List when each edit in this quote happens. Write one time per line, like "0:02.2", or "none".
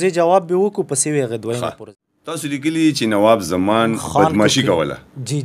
0:01.8